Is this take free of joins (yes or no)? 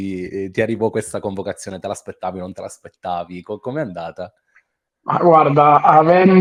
yes